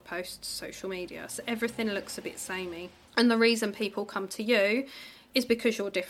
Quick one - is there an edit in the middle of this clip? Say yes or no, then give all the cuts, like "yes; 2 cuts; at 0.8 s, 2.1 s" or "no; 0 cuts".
yes; 1 cut; at 3.0 s